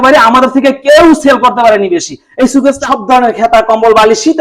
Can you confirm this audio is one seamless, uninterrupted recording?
no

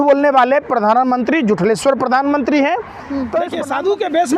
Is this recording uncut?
no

